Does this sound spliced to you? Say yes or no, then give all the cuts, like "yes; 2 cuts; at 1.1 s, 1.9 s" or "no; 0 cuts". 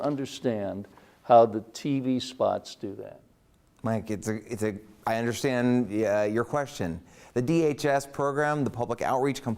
no; 0 cuts